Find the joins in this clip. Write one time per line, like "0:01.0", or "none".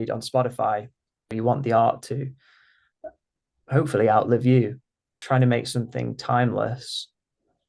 0:01.3
0:05.1

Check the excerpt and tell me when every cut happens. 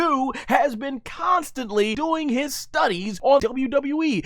0:02.0
0:03.4

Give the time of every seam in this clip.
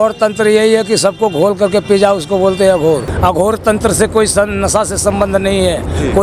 0:03.1

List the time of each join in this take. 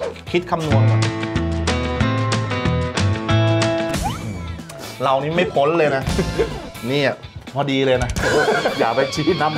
0:04.0
0:06.7

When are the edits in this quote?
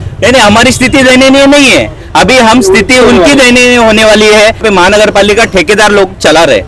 0:04.6

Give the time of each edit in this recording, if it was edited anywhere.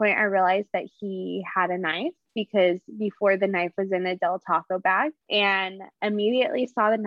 0:05.5

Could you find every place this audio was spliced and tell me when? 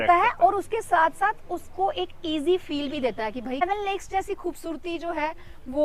0:03.6

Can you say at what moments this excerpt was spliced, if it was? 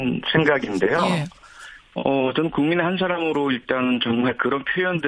none

